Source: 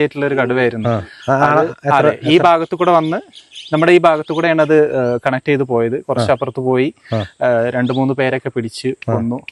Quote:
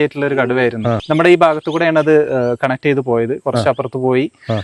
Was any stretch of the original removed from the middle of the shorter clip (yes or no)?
yes